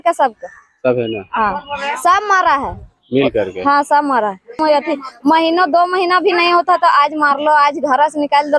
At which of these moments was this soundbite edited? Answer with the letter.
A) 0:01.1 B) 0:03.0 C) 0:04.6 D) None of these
C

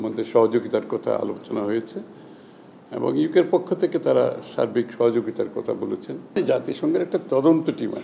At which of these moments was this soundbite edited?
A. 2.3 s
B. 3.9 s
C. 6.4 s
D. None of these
C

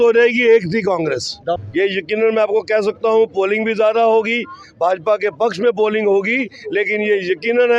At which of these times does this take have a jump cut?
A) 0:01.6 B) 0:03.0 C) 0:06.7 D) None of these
A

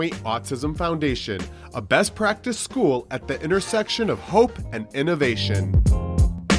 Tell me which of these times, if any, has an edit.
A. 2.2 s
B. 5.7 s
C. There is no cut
B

